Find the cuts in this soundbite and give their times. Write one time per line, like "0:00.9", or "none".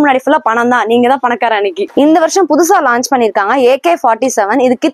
0:01.8